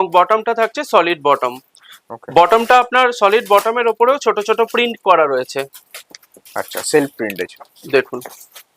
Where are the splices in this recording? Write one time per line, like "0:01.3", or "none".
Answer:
none